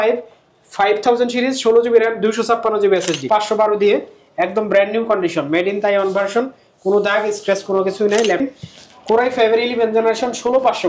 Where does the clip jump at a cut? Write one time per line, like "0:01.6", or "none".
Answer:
0:03.2
0:08.4